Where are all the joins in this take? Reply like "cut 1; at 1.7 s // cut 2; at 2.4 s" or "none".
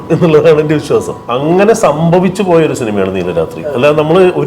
cut 1; at 1.2 s